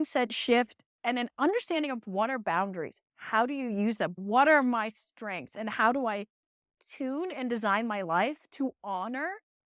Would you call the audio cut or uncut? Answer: cut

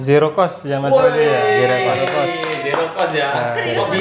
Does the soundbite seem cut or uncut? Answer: uncut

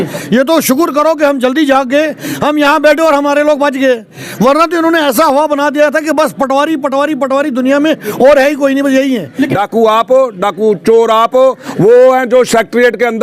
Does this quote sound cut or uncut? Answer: cut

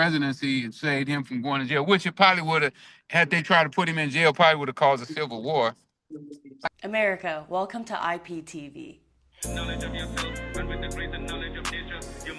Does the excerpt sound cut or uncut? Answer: cut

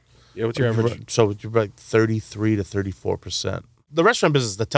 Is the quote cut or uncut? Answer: cut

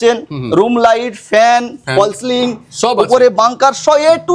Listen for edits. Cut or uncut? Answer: uncut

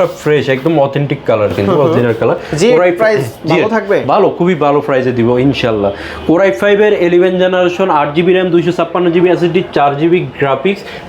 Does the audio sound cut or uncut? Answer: uncut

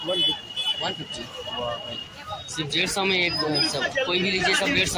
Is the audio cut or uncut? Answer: uncut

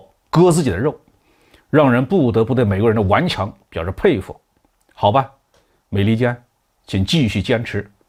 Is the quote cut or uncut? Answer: uncut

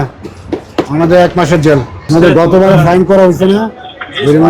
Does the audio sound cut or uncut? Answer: cut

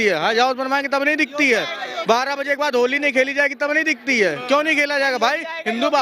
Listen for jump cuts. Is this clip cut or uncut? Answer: uncut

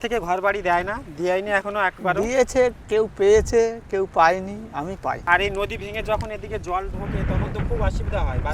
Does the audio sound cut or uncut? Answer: cut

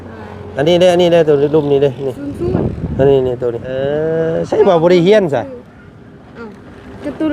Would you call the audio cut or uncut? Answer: cut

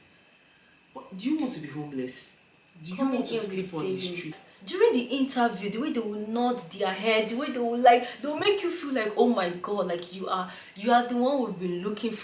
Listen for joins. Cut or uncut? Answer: cut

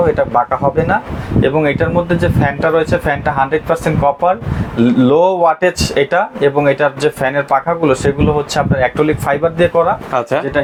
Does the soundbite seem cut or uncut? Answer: uncut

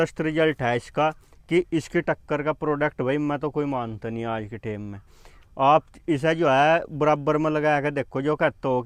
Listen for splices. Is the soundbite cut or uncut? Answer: uncut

